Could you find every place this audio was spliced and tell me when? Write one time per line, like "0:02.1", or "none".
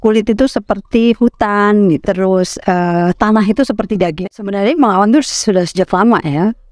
0:02.0
0:03.9